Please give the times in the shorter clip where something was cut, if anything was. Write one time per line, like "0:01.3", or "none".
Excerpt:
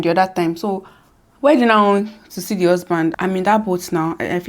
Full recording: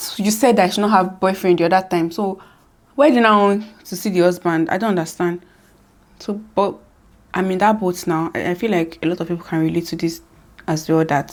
0:03.1